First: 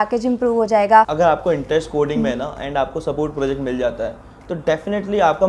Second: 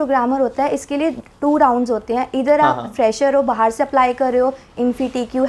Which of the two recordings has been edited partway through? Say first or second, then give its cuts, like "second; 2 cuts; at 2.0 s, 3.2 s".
first; 1 cut; at 1.1 s